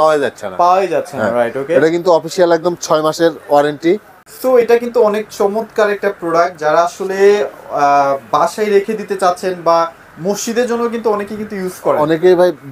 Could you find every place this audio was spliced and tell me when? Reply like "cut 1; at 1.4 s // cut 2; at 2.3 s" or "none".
cut 1; at 4.2 s